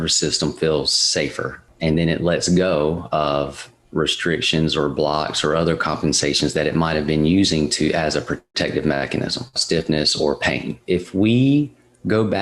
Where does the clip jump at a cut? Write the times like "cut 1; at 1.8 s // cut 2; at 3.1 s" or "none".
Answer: cut 1; at 1.6 s // cut 2; at 9.6 s // cut 3; at 10.7 s